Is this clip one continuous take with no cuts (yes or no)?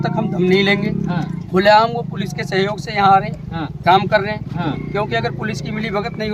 yes